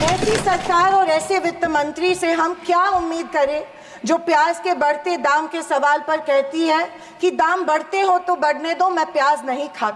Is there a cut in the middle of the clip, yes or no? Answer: no